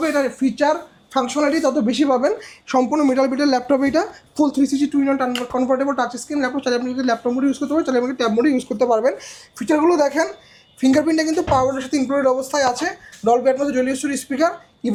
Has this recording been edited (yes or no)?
no